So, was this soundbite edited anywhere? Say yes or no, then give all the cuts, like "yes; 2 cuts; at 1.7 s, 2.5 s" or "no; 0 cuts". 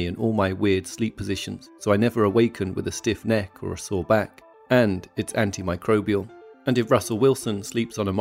no; 0 cuts